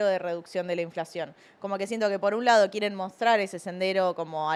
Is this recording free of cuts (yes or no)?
yes